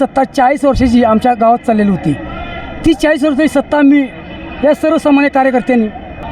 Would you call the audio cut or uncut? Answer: uncut